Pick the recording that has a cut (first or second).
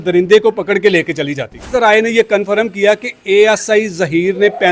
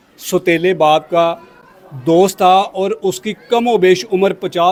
first